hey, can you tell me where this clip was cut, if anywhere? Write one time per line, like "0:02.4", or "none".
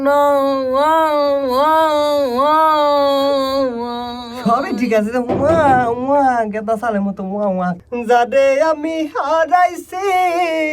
0:07.8